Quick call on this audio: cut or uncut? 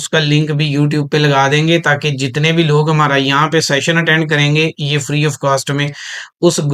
uncut